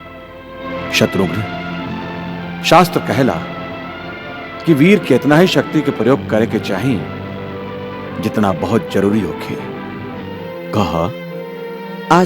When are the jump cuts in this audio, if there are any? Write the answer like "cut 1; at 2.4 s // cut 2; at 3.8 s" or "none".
cut 1; at 10.3 s